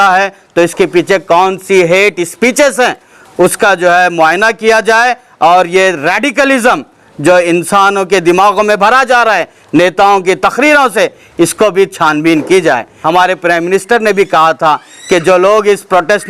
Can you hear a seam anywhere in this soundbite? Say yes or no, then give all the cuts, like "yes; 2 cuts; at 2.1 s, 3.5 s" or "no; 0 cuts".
yes; 1 cut; at 12.9 s